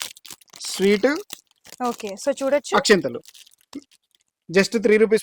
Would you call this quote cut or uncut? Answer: uncut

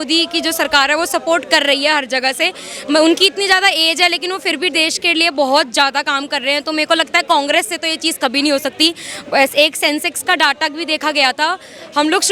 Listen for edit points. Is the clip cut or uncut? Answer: uncut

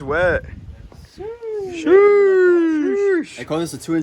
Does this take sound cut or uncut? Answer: cut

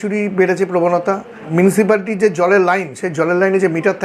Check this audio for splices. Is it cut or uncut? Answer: cut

